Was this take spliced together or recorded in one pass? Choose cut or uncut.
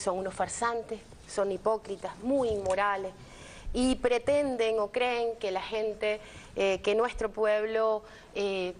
uncut